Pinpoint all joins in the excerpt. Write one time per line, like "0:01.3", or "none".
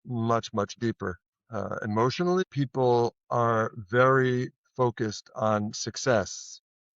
0:02.4